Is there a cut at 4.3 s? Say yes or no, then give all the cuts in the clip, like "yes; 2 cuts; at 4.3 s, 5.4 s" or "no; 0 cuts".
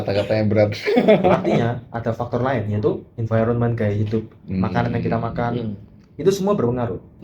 no; 1 cut; at 1.5 s